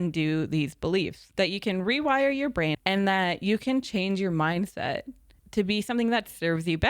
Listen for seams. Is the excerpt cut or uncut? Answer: cut